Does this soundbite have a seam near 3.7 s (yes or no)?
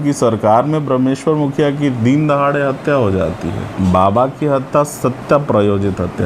yes